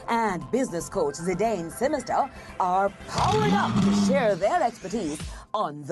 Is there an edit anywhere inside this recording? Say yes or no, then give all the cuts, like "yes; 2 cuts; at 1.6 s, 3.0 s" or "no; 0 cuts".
no; 0 cuts